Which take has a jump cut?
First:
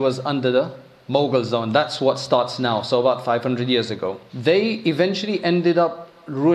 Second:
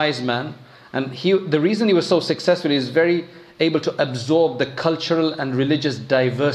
first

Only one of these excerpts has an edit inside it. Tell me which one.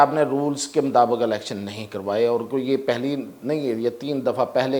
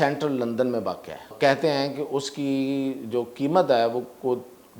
second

